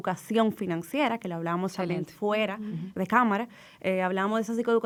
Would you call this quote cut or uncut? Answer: uncut